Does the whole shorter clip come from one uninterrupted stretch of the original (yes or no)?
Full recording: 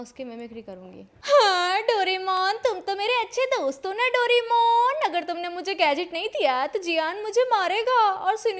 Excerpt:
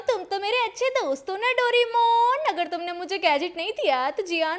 yes